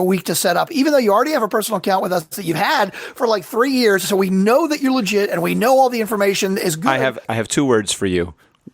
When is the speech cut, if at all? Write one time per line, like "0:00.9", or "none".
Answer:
0:07.2